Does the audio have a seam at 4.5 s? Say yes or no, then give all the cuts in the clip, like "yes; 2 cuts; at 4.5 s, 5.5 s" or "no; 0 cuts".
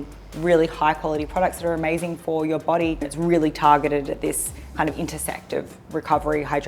no; 1 cut; at 3.1 s